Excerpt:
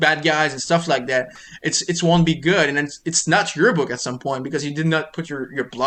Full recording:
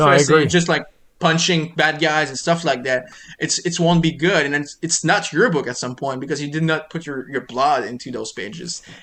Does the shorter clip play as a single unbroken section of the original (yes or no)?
yes